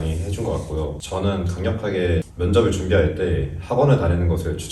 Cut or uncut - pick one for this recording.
cut